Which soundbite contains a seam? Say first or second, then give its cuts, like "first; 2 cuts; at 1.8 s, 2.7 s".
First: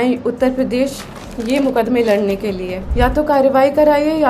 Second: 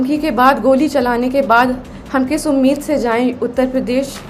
first; 1 cut; at 2.8 s